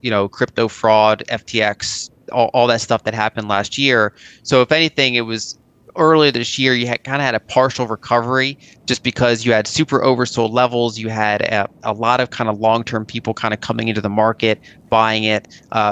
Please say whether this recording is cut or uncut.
uncut